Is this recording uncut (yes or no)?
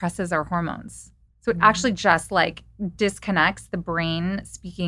yes